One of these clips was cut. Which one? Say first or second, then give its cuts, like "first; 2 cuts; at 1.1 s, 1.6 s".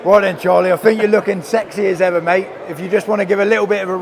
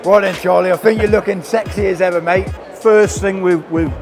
second; 1 cut; at 2.6 s